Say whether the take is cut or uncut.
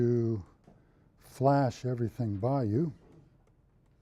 uncut